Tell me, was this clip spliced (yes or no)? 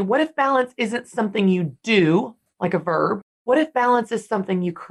yes